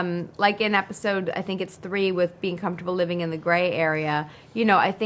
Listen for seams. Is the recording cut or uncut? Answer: uncut